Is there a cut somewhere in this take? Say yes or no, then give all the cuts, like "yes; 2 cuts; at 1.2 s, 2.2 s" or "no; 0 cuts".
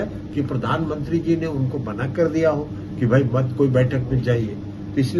no; 0 cuts